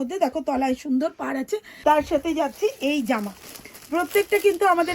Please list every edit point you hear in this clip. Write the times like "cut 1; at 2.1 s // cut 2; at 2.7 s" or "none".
cut 1; at 1.7 s